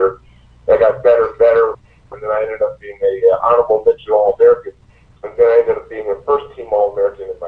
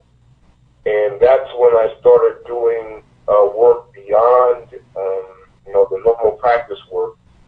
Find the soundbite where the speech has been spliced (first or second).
first